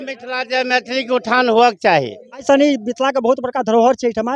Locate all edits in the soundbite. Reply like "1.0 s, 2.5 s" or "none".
2.5 s